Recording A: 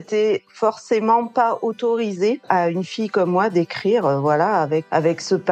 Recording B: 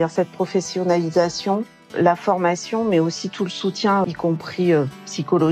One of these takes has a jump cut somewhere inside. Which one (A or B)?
B